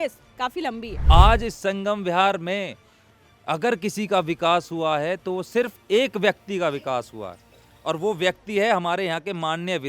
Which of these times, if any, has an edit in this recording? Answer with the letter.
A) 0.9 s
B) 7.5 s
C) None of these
A